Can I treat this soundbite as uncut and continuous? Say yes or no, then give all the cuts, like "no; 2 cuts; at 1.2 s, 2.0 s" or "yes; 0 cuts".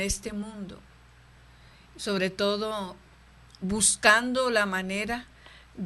yes; 0 cuts